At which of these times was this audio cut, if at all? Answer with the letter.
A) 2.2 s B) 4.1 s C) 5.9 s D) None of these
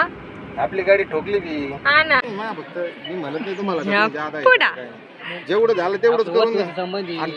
A